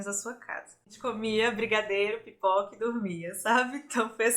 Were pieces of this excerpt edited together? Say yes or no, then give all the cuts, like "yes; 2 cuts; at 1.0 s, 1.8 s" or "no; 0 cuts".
yes; 1 cut; at 1.0 s